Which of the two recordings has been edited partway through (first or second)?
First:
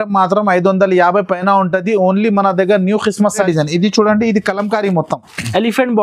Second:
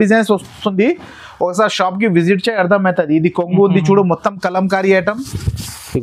first